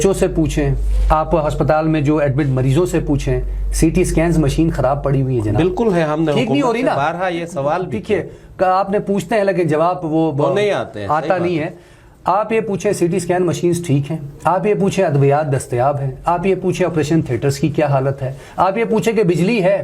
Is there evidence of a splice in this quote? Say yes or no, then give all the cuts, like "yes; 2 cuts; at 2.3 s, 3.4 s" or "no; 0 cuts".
no; 0 cuts